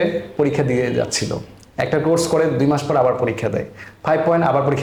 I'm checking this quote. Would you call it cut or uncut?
uncut